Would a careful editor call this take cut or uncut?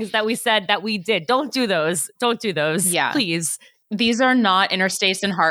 uncut